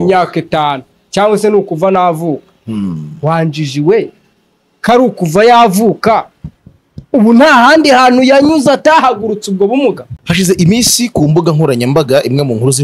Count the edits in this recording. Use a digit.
1